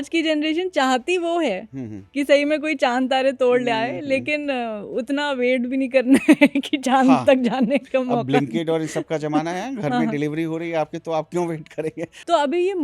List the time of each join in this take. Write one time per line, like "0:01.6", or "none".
none